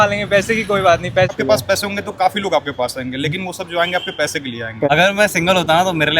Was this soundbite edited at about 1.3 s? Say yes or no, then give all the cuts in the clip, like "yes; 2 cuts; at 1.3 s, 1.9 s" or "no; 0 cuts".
yes; 2 cuts; at 1.3 s, 4.9 s